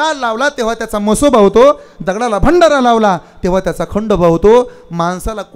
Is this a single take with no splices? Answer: yes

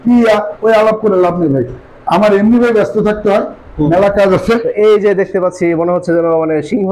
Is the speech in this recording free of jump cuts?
no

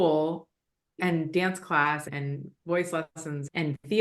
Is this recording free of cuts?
no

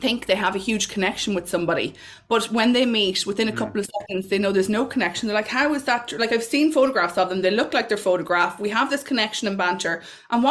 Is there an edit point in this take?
no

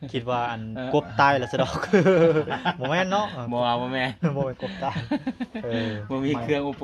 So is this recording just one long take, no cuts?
yes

